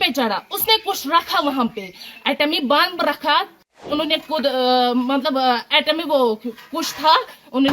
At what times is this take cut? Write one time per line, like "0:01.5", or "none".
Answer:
0:03.8

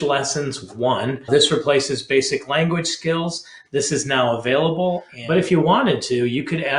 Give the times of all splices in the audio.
0:01.3
0:05.1

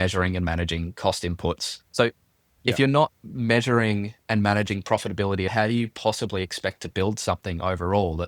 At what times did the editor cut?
0:01.7
0:05.5

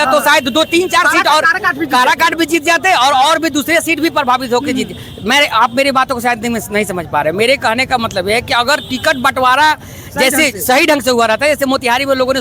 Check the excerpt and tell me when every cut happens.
none

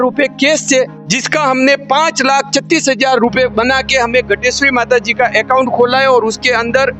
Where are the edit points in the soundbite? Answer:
none

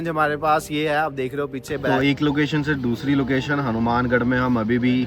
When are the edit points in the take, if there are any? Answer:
0:01.9

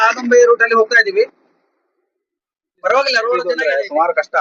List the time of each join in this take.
0:03.4

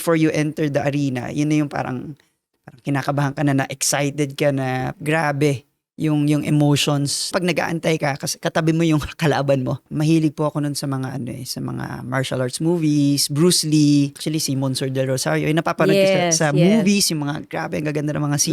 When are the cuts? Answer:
0:04.9
0:07.3
0:09.9
0:14.2

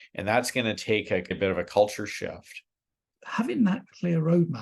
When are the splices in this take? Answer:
0:03.1

